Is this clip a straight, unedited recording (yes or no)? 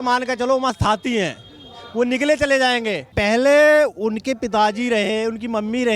no